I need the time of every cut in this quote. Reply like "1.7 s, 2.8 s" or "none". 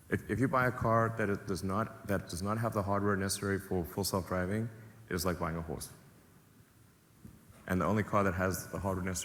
none